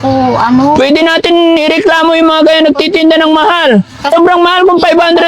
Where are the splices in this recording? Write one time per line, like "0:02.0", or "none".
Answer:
0:04.1